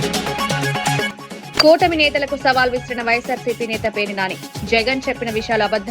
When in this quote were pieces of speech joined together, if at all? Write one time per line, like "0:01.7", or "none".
0:01.2